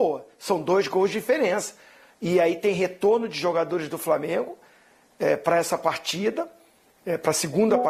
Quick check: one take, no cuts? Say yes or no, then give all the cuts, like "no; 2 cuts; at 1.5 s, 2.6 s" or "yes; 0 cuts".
yes; 0 cuts